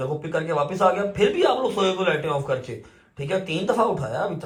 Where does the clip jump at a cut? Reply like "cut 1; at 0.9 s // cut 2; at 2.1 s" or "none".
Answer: none